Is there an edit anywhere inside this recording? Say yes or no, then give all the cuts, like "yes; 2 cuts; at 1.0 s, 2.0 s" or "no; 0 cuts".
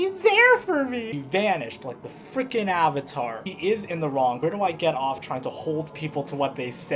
yes; 3 cuts; at 1.0 s, 3.4 s, 4.4 s